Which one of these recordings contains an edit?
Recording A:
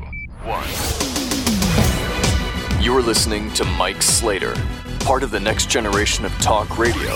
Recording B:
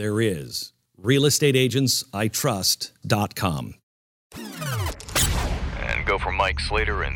B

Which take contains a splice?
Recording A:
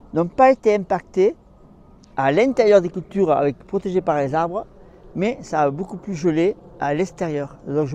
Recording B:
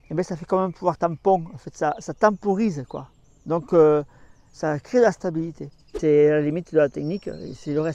B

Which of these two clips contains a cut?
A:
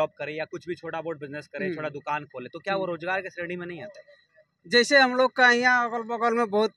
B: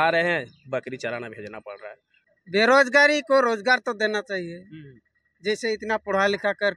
B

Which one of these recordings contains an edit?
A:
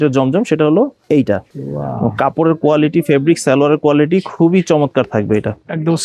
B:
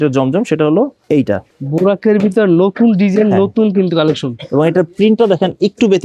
B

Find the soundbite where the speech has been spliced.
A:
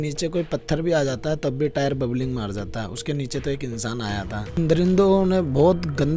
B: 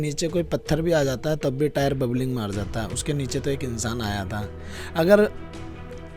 A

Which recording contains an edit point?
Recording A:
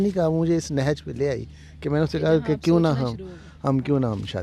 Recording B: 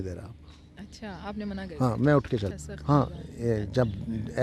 B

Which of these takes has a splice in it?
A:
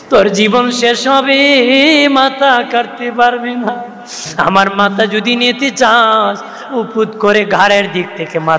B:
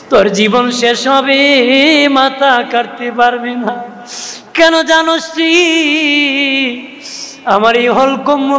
A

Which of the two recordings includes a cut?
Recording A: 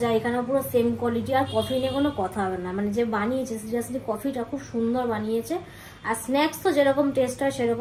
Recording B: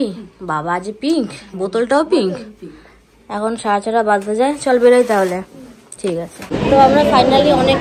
B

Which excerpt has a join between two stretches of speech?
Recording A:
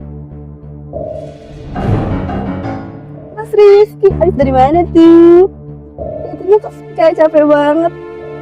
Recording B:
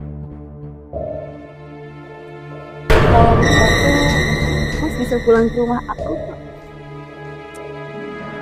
A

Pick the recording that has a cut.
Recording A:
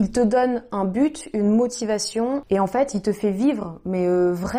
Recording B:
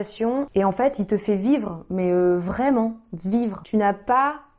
B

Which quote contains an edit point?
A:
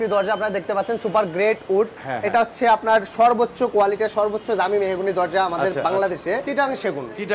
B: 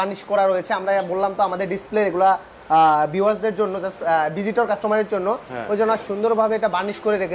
A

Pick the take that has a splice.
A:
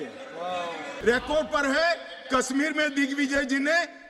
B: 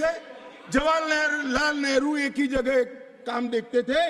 A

